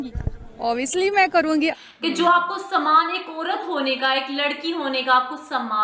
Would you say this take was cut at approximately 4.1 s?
no; 1 cut; at 1.7 s

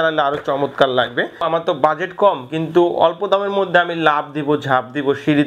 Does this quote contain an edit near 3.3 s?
no; 1 cut; at 1.5 s

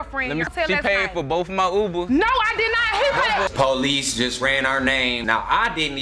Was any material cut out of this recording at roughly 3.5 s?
yes; 1 cut; at 3.5 s

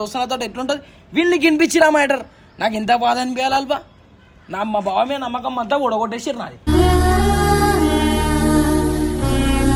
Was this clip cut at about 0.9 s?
no; 0 cuts

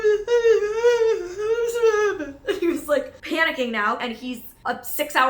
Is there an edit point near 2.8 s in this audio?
no; 1 cut; at 4.0 s

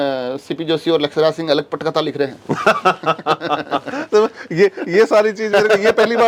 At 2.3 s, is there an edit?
no; 0 cuts

